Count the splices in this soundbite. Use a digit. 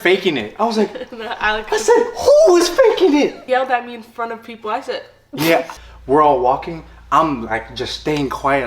2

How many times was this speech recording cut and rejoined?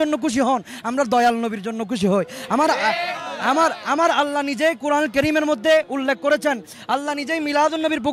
0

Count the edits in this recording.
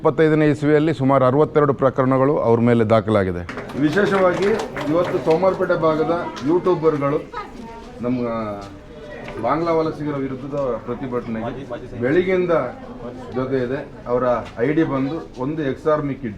1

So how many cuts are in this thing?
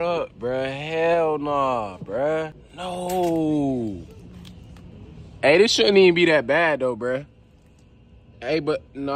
2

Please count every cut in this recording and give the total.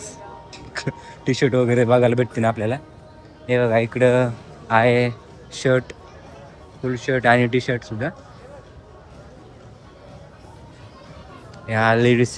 0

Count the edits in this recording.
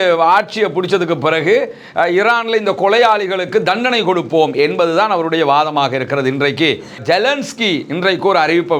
1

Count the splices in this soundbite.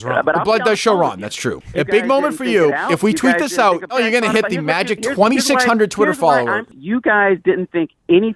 3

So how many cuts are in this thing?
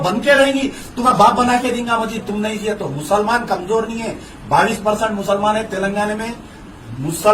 1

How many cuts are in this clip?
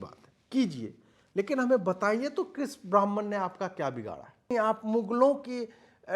1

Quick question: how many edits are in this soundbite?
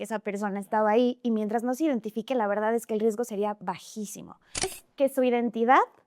1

